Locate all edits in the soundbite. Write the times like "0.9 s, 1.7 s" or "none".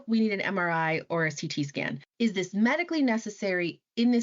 2.1 s

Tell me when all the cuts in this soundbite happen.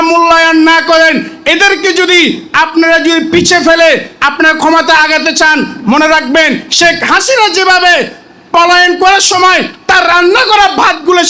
none

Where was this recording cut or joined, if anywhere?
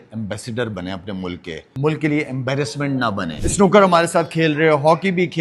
1.6 s, 3.4 s

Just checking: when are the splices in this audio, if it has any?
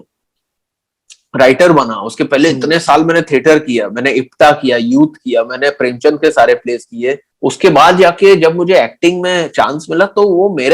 7.3 s

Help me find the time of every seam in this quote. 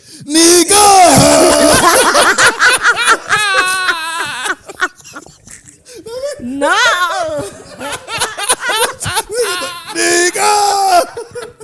none

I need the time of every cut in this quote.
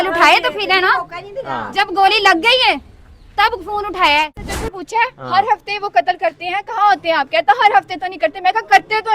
4.5 s

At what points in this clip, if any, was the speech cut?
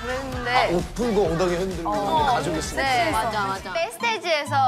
3.7 s

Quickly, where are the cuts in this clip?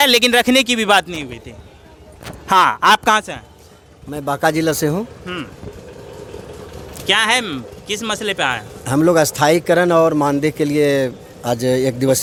none

